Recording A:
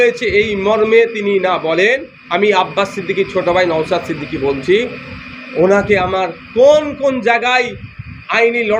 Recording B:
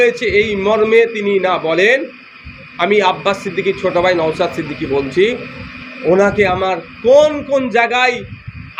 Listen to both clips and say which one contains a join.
A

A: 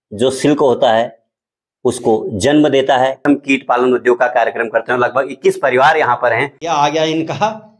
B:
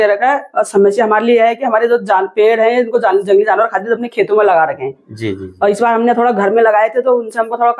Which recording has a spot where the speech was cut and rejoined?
A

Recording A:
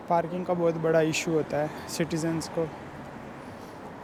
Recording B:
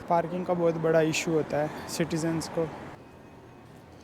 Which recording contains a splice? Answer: B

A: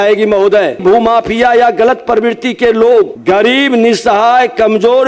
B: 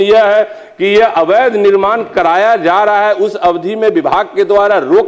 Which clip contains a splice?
A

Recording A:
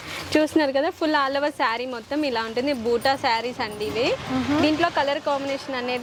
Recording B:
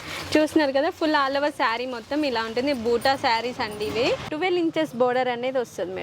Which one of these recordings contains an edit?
B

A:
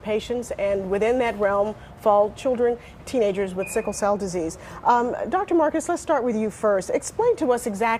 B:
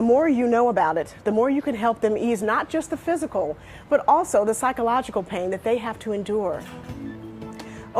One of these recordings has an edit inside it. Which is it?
B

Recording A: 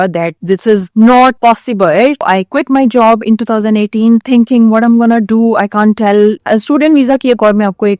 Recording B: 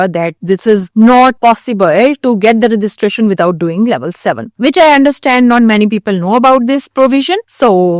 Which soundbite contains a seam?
A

